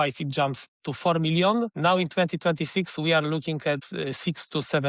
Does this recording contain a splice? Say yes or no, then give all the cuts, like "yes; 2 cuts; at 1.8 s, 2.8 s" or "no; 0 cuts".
yes; 1 cut; at 1.7 s